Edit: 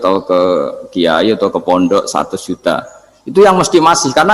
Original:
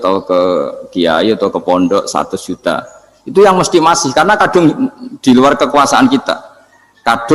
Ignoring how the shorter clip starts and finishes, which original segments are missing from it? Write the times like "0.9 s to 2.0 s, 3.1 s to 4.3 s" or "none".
none